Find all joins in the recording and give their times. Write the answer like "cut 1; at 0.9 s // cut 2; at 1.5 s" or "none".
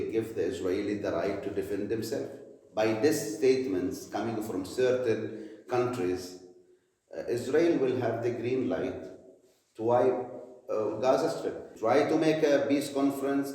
cut 1; at 11.7 s